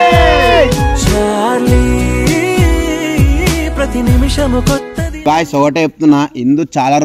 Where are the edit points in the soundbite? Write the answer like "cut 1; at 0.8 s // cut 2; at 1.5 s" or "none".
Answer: none